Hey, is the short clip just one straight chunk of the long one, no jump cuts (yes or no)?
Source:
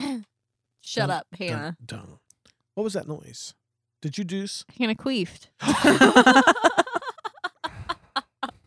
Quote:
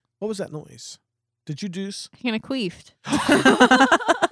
yes